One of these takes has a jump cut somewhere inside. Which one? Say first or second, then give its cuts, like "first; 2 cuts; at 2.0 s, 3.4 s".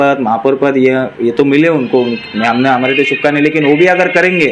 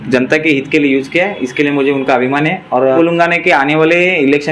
second; 1 cut; at 3.0 s